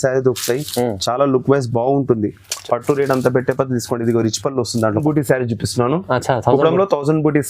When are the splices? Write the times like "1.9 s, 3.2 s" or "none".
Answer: 5.0 s